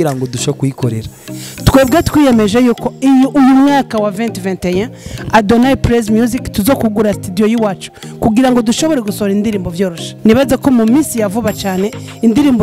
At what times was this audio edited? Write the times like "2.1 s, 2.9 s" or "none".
1.3 s, 10.0 s